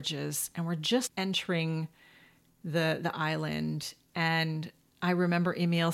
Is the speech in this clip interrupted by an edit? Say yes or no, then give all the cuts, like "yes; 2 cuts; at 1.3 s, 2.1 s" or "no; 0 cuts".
yes; 1 cut; at 1.1 s